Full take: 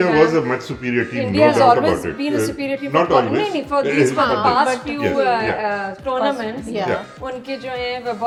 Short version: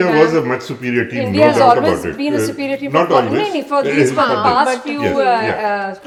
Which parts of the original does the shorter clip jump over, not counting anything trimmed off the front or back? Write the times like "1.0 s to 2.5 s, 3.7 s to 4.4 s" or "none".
none